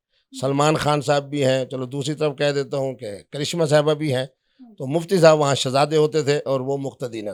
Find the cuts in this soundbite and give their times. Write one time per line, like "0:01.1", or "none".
none